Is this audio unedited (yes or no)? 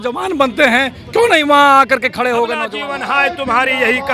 no